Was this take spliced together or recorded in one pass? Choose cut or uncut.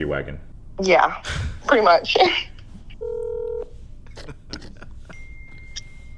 uncut